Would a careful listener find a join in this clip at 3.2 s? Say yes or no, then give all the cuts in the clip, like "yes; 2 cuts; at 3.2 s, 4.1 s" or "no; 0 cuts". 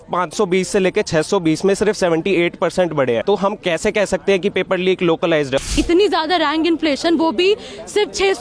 yes; 2 cuts; at 3.2 s, 5.7 s